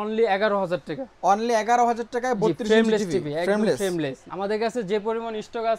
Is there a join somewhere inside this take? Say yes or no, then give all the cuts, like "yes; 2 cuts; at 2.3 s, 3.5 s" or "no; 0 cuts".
yes; 1 cut; at 4.2 s